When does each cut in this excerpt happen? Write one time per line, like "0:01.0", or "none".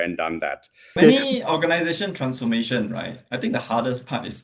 0:01.0

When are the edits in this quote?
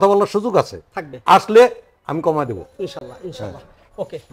none

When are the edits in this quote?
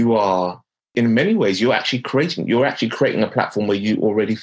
0:00.9

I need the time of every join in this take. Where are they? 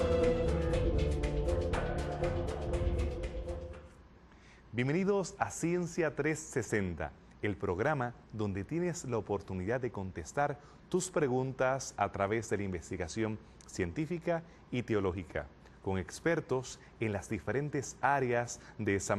none

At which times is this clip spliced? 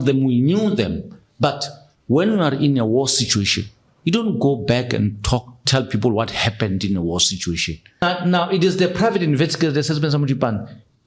0:08.0

